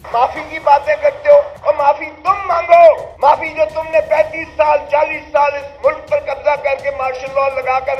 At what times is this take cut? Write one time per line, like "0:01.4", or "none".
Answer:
0:01.5
0:03.1

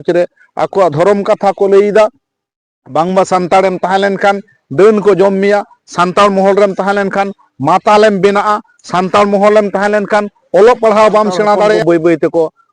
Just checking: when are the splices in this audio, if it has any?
0:11.8

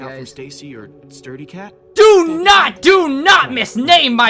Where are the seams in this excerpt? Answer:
none

